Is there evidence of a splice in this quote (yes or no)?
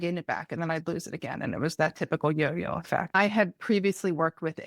yes